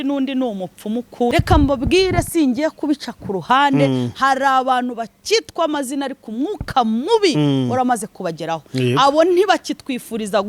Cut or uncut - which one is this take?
cut